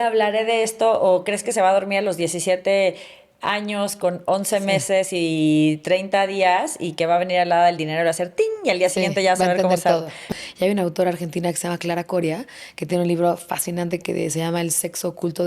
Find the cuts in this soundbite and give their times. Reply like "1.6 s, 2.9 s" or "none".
10.3 s